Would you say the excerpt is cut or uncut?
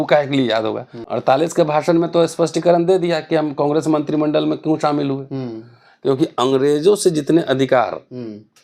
cut